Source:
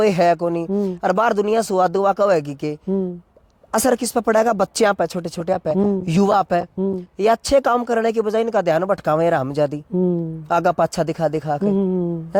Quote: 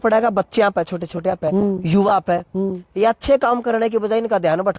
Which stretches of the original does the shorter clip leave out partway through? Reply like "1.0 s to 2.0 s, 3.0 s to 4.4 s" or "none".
none